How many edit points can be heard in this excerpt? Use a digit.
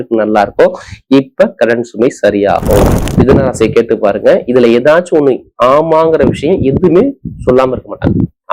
1